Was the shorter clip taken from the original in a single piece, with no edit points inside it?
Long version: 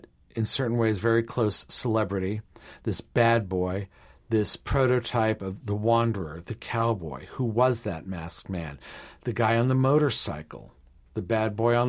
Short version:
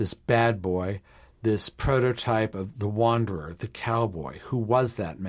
yes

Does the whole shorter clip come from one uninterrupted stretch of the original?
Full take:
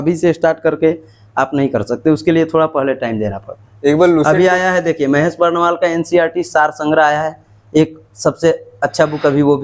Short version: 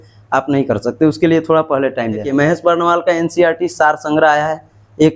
no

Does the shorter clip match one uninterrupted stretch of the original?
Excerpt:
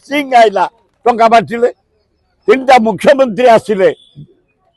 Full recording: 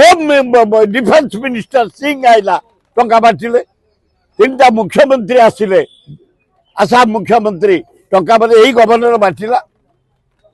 yes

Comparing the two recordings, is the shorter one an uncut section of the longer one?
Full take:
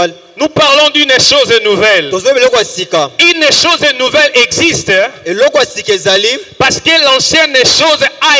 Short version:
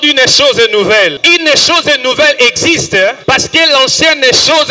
no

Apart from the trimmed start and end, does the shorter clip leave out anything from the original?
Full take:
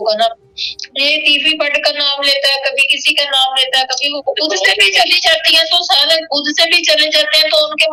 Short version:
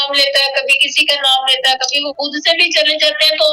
yes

